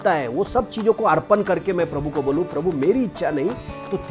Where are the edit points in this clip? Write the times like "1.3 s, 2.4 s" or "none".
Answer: none

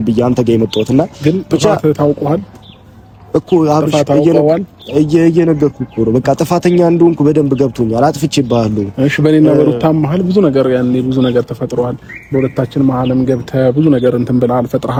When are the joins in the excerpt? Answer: none

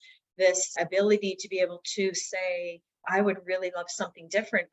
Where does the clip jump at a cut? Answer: none

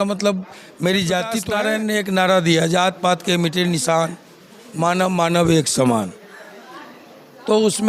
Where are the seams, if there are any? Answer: 1.4 s

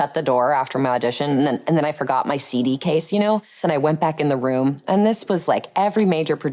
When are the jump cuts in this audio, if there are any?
3.6 s

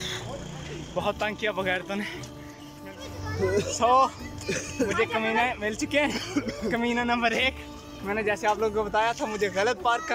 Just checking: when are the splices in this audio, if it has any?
2.6 s

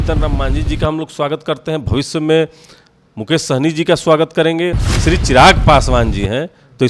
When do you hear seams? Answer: 4.7 s

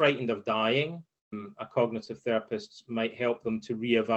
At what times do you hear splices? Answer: 1.4 s

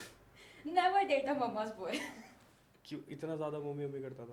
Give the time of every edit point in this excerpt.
none

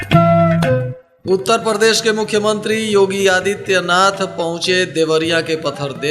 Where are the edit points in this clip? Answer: 1.0 s

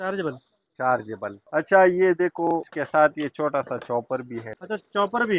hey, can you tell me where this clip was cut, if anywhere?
1.4 s, 2.7 s, 4.5 s

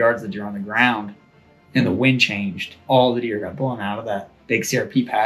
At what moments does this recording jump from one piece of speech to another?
2.7 s

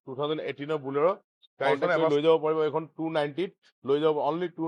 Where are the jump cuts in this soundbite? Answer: 2.1 s

